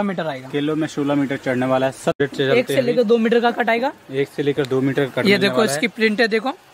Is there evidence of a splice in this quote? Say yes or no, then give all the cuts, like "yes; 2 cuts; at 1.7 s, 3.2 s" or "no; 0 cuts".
yes; 1 cut; at 2.2 s